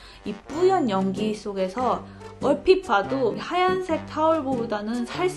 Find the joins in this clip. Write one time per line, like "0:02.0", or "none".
0:03.4

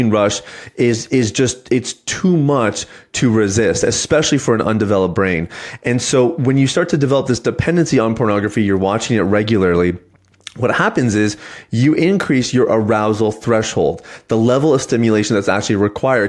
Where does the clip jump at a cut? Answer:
none

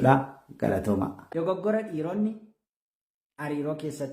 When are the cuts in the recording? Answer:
0:01.2

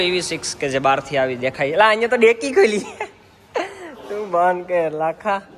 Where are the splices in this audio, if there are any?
none

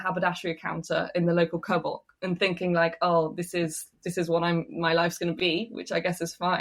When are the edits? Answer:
0:05.3

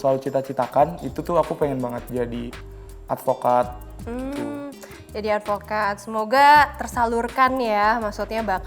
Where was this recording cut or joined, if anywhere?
none

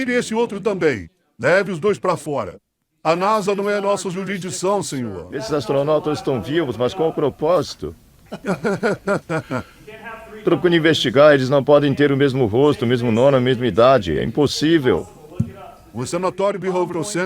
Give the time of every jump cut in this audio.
0:05.2

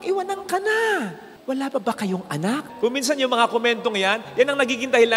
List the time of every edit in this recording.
0:01.3
0:02.7

